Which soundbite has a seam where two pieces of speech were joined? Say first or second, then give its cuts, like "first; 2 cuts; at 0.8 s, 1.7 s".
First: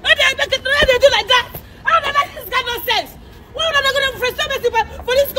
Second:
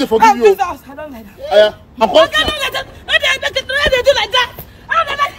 second; 1 cut; at 2.0 s